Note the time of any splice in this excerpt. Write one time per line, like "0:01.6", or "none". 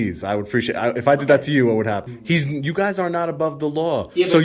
0:02.1